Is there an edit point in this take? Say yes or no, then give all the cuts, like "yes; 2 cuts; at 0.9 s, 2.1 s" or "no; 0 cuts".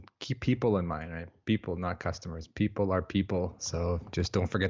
yes; 1 cut; at 3.6 s